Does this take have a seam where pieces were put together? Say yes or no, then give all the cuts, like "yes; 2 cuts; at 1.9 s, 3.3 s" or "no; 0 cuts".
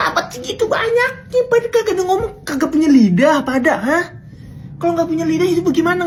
no; 0 cuts